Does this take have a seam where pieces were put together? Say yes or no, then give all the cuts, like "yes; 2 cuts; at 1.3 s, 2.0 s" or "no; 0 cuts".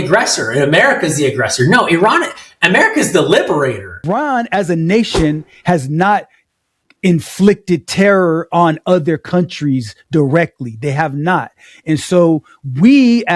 yes; 1 cut; at 4.1 s